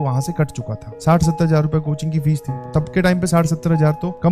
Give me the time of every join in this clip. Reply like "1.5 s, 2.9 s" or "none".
0.9 s, 2.6 s